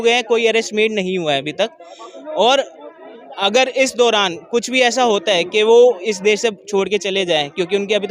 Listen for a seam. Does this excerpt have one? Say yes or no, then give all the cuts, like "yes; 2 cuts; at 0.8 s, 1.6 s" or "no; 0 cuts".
no; 0 cuts